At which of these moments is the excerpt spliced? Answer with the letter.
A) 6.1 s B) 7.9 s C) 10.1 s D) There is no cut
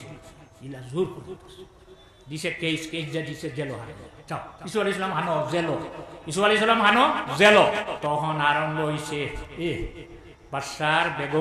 B